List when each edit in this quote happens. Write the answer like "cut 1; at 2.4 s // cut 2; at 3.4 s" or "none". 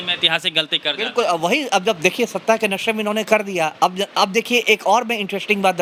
none